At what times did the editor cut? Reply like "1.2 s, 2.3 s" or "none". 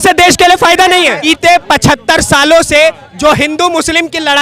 1.2 s